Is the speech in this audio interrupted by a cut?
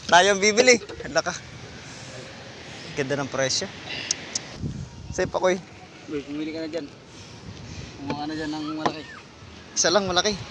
yes; 1 cut; at 4.5 s

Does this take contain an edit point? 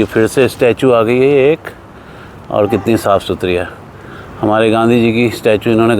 no; 0 cuts

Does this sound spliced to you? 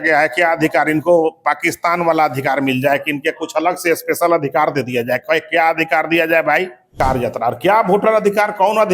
yes; 1 cut; at 7.0 s

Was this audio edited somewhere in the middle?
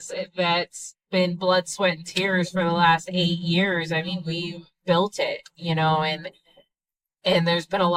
no; 0 cuts

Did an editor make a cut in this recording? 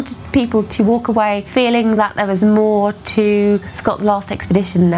yes; 2 cuts; at 1.4 s, 3.7 s

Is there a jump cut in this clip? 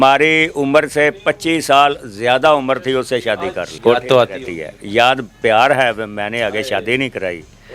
yes; 1 cut; at 3.7 s

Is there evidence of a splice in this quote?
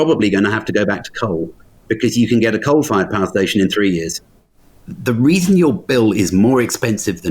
yes; 1 cut; at 4.8 s

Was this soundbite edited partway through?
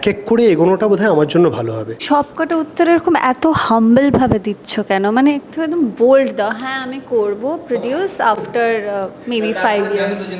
yes; 1 cut; at 1.9 s

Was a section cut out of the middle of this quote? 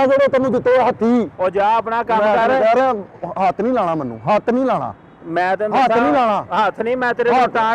yes; 1 cut; at 4.9 s

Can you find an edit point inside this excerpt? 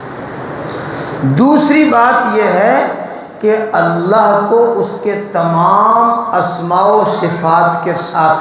no; 0 cuts

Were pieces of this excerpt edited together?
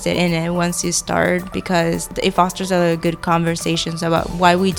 no; 0 cuts

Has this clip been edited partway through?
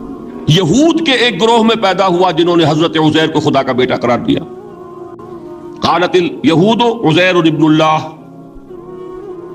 no; 0 cuts

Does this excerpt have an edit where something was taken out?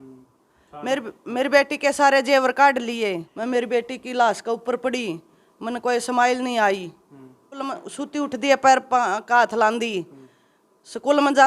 yes; 2 cuts; at 3.3 s, 7.6 s

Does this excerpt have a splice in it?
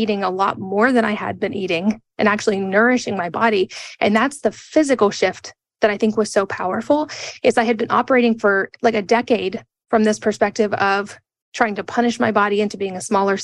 no; 0 cuts

